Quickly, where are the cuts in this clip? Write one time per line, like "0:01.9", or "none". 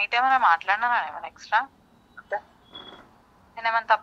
none